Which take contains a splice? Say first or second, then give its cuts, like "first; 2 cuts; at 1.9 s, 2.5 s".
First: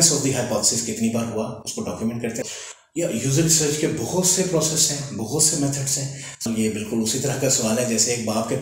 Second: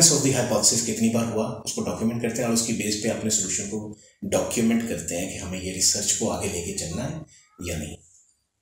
first; 2 cuts; at 2.4 s, 6.5 s